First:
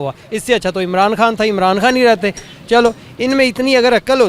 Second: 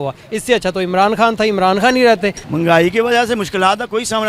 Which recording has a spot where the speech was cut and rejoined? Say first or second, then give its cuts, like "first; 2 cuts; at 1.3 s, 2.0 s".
second; 1 cut; at 2.5 s